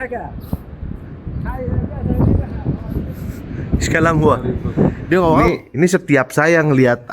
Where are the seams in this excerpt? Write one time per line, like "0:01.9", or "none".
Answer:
0:05.4